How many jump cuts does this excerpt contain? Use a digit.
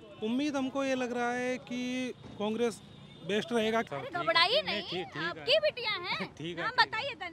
1